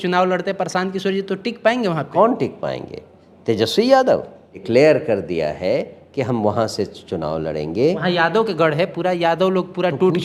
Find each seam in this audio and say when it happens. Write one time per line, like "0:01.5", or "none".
0:02.0
0:04.6
0:08.0